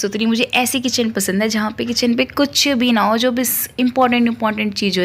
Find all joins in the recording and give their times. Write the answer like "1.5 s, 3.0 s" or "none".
none